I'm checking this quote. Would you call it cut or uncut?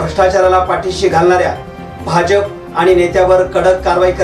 uncut